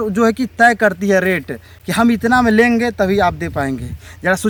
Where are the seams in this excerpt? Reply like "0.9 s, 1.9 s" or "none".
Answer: none